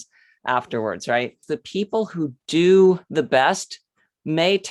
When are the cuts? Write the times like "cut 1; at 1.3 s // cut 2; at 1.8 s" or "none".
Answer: cut 1; at 1.5 s // cut 2; at 3.1 s